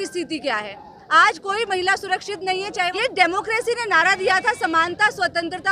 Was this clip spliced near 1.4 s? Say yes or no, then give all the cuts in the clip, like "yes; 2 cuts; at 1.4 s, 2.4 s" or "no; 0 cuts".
no; 1 cut; at 2.9 s